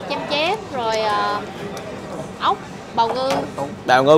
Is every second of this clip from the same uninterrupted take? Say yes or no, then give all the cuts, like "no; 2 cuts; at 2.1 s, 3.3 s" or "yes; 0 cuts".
yes; 0 cuts